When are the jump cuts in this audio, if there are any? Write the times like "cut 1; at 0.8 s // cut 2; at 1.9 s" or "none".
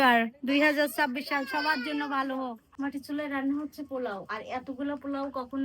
cut 1; at 2.6 s

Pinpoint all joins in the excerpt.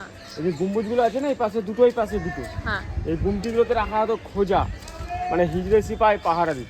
none

